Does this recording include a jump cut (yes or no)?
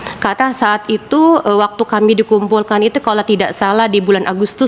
no